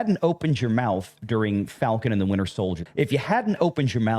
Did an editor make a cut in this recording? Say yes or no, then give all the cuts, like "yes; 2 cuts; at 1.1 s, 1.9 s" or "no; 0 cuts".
yes; 1 cut; at 2.8 s